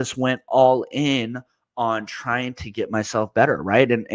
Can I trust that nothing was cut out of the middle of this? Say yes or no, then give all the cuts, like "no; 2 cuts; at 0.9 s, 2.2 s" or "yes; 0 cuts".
yes; 0 cuts